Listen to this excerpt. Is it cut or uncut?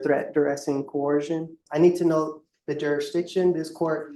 cut